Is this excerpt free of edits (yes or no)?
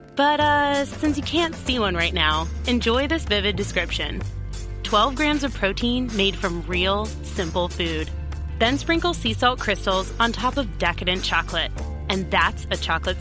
yes